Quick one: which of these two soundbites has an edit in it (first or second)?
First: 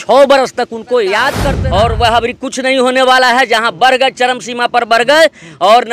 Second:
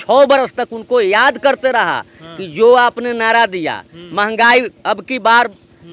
first